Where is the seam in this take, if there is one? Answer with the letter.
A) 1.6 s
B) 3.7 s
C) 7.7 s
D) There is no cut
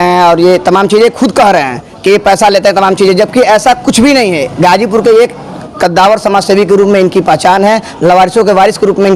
D